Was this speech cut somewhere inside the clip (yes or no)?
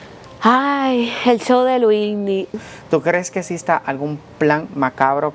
yes